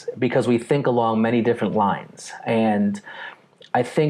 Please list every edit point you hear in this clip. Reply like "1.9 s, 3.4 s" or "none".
none